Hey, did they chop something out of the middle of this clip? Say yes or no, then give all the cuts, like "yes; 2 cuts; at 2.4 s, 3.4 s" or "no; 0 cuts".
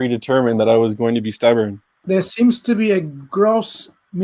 yes; 1 cut; at 1.9 s